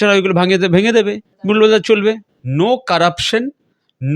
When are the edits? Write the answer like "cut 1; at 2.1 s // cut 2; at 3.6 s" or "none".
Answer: cut 1; at 1.3 s // cut 2; at 2.3 s